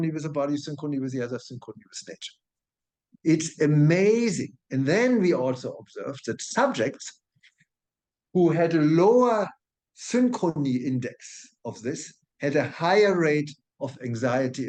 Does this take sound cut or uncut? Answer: uncut